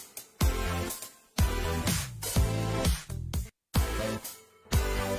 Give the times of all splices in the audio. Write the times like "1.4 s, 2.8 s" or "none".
3.5 s